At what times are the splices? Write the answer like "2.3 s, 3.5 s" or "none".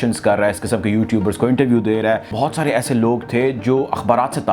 2.3 s